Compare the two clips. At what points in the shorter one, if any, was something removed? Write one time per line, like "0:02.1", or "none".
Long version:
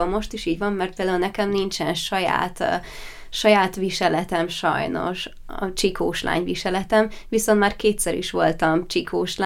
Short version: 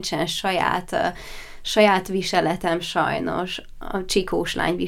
none